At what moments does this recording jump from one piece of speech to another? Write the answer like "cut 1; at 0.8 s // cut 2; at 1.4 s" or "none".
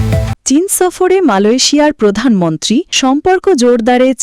none